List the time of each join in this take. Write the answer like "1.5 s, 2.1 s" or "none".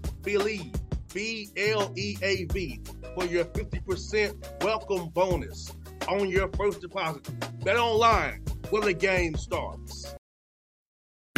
10.2 s

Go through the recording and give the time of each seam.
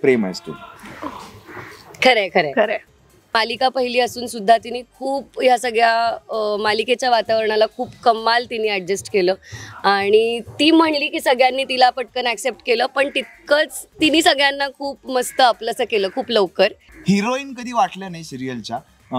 3.3 s, 16.9 s

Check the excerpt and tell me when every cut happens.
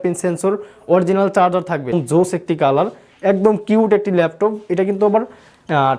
1.9 s

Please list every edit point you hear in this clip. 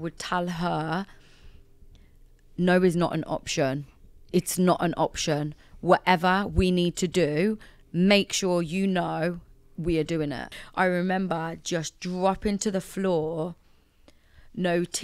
10.6 s

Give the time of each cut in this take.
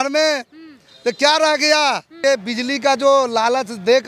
2.1 s

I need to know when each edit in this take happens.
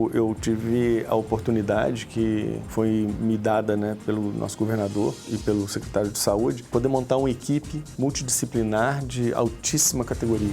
2.6 s, 5.2 s, 6.6 s

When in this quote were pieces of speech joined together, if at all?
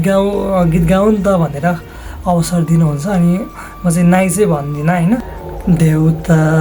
5.4 s

